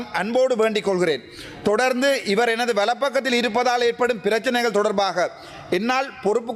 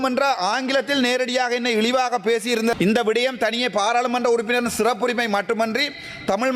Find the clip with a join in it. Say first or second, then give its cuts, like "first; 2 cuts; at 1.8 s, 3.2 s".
second; 1 cut; at 2.7 s